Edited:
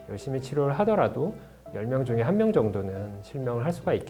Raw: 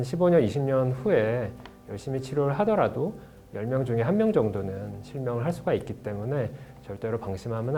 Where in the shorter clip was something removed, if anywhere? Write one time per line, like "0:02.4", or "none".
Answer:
none